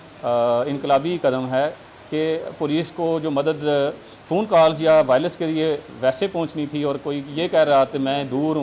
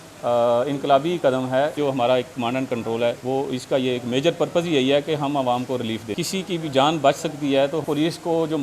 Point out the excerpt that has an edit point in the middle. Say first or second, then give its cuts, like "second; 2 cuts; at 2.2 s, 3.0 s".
second; 4 cuts; at 1.8 s, 3.2 s, 6.1 s, 7.8 s